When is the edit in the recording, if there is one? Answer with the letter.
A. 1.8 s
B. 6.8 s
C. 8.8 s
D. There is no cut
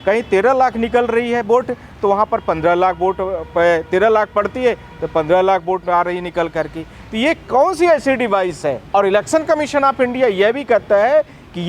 C